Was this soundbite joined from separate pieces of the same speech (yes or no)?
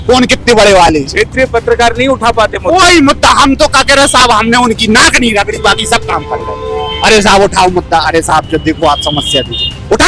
no